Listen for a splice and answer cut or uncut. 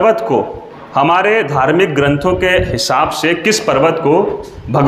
uncut